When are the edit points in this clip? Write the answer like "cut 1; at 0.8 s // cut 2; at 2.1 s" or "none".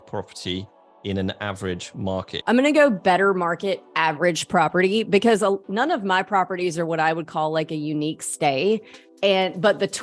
cut 1; at 2.0 s

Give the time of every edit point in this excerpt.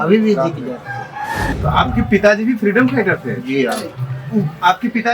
cut 1; at 1.5 s

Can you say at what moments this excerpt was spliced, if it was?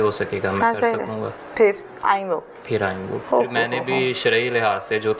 cut 1; at 3.1 s

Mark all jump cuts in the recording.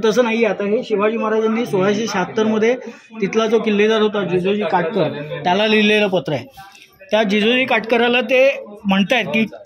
none

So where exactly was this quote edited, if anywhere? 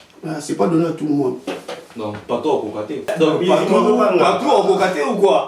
cut 1; at 3.1 s

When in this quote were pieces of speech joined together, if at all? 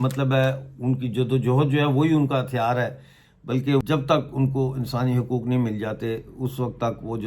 cut 1; at 3.8 s

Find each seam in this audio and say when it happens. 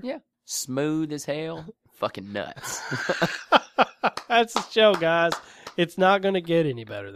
none

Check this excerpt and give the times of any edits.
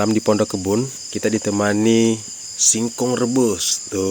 cut 1; at 1.0 s

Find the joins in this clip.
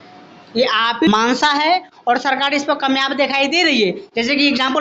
cut 1; at 1.1 s

